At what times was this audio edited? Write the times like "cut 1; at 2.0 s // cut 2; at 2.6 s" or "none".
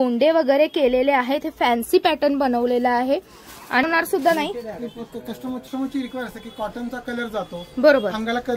none